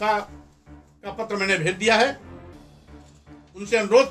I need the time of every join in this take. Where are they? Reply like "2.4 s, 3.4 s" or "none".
none